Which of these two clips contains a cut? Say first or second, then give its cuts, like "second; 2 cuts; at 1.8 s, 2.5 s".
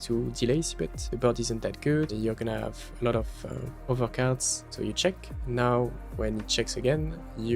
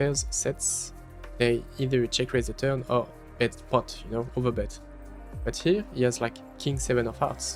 first; 4 cuts; at 1.0 s, 2.1 s, 3.7 s, 4.6 s